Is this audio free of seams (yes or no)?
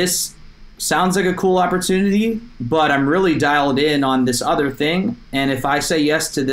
yes